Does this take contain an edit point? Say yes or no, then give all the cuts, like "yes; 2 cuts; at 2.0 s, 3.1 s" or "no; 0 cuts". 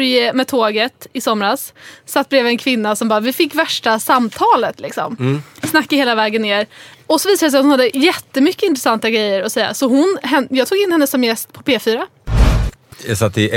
yes; 1 cut; at 12.5 s